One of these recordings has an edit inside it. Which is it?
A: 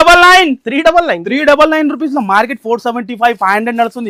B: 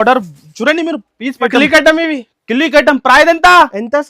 B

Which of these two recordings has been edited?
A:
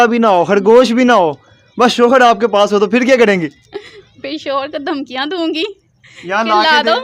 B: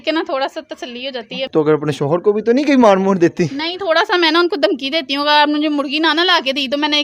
B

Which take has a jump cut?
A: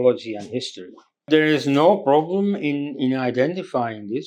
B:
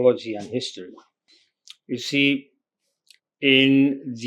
A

